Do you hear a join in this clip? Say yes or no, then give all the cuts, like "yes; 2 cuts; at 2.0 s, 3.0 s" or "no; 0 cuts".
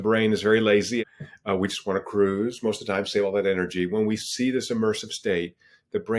yes; 1 cut; at 1.0 s